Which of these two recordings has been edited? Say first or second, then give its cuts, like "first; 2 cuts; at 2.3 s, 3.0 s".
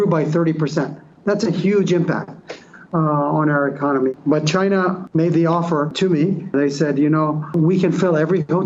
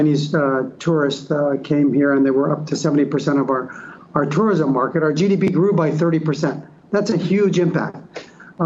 first; 4 cuts; at 4.1 s, 5.0 s, 6.5 s, 7.5 s